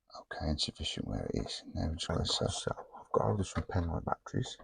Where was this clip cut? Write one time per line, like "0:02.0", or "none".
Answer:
0:02.6